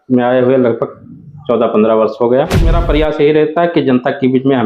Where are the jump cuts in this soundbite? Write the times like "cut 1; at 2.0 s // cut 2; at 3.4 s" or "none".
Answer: cut 1; at 2.7 s